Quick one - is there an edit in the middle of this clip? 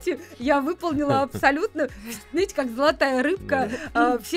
no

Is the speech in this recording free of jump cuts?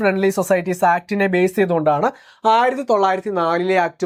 yes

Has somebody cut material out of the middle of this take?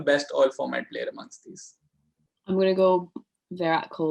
no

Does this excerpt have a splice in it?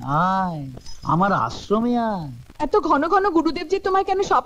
yes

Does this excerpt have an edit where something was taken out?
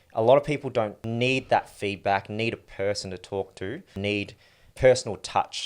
yes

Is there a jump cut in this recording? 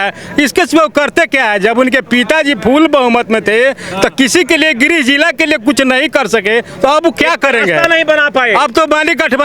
no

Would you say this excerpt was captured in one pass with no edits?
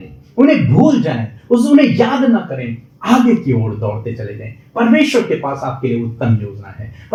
yes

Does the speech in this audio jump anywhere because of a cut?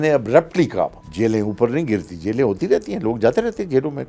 yes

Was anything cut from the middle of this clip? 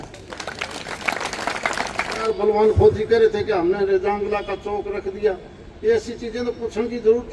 yes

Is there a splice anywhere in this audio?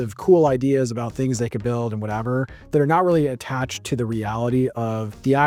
no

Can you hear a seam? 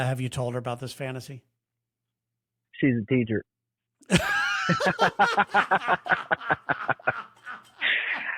no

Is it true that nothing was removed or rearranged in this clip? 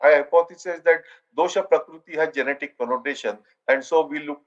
yes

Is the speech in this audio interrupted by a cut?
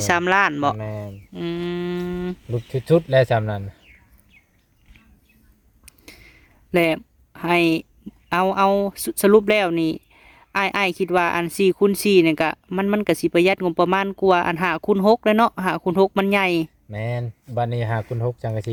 no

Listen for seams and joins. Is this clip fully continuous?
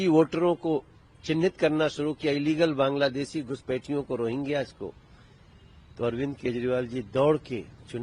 yes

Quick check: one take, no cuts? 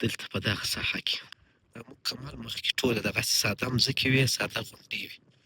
no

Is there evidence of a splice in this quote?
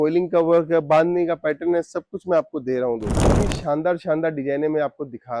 yes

